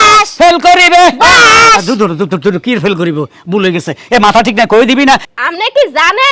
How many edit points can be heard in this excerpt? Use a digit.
1